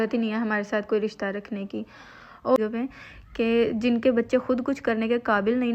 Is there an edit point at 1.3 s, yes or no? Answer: no